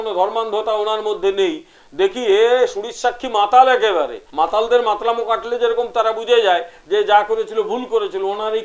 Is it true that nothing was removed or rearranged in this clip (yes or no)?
no